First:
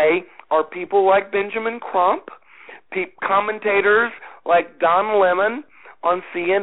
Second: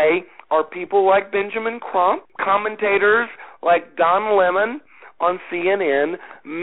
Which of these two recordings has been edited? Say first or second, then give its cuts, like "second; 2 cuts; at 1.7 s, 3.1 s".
second; 1 cut; at 2.3 s